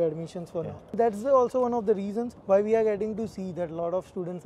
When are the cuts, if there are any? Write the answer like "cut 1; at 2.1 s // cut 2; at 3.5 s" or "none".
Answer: cut 1; at 0.9 s // cut 2; at 2.3 s